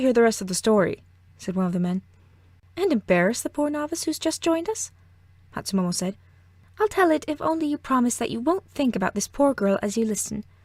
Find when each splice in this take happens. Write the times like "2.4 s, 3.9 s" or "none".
none